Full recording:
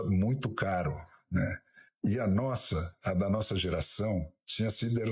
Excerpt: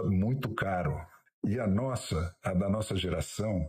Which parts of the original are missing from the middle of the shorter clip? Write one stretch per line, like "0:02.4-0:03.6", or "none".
0:01.1-0:01.7